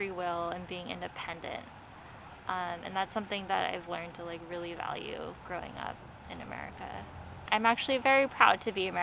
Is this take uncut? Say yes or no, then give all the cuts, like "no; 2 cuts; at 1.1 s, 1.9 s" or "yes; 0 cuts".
no; 1 cut; at 7.4 s